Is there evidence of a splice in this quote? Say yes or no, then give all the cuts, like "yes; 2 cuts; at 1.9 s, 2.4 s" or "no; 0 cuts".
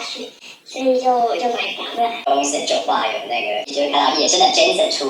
yes; 1 cut; at 2.2 s